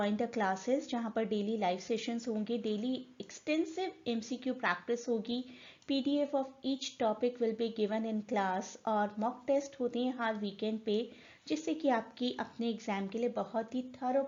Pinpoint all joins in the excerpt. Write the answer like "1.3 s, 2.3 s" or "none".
none